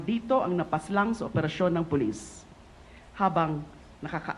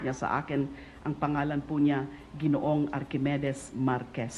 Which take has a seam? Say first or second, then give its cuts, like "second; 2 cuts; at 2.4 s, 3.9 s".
second; 1 cut; at 1.9 s